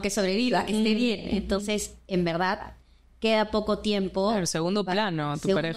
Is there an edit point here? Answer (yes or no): no